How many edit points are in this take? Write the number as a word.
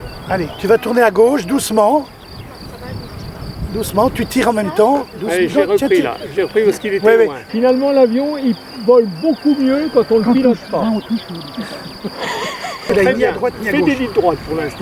two